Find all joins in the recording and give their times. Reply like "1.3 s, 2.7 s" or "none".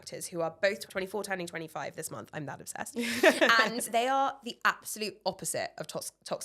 0.8 s, 3.9 s